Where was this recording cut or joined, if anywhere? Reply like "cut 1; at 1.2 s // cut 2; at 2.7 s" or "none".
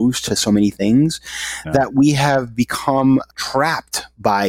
cut 1; at 3.3 s